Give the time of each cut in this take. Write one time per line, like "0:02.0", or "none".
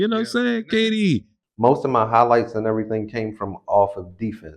0:01.3